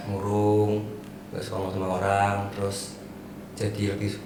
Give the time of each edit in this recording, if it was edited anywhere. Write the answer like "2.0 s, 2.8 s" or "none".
none

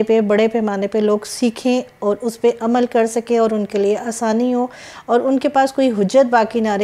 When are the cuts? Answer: none

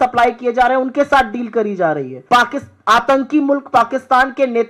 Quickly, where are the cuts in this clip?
2.1 s

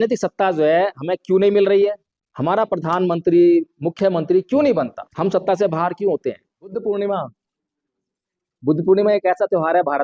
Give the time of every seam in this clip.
2.0 s, 5.0 s, 6.7 s

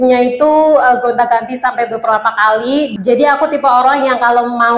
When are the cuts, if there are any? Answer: 2.9 s

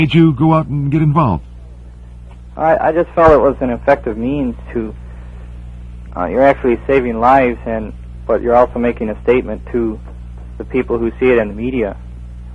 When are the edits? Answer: none

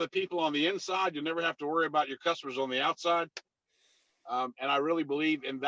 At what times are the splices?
none

